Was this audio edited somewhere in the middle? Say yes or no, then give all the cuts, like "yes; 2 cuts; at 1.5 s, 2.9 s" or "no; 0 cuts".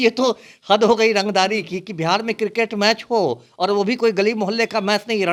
no; 0 cuts